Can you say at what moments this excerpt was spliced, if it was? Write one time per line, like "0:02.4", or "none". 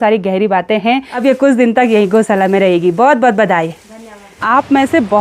0:01.1
0:04.4